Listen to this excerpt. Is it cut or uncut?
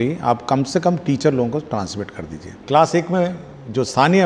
cut